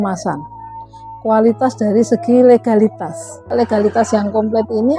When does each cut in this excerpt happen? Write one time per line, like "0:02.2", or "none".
0:03.5